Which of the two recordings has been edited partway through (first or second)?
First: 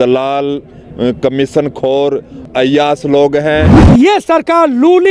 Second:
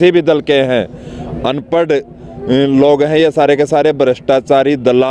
first